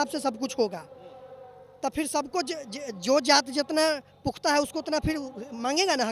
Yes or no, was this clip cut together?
no